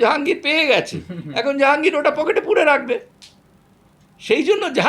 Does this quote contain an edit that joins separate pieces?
no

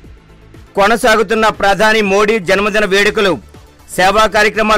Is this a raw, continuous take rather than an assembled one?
yes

